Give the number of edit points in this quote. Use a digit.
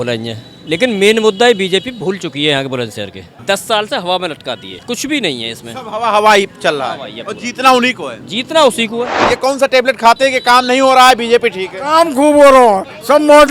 3